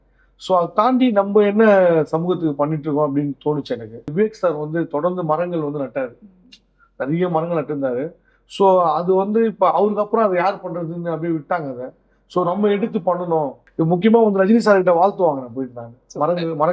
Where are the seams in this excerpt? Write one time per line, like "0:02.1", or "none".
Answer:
0:04.1
0:13.6

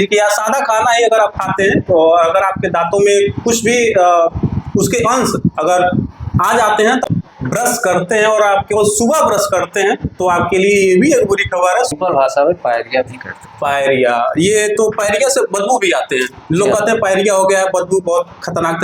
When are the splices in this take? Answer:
0:07.1
0:11.9

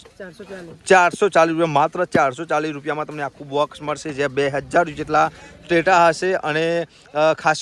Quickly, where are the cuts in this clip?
none

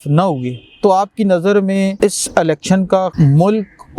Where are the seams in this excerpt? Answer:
0:01.9
0:03.1

